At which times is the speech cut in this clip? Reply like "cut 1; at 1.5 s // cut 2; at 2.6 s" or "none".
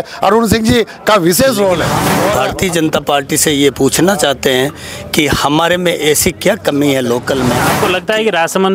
cut 1; at 2.2 s // cut 2; at 7.7 s